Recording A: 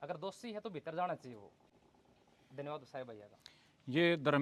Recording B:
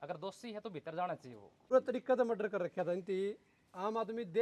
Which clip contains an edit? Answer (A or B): B